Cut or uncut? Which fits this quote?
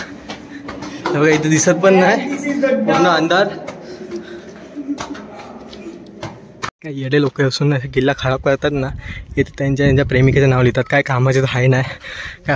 cut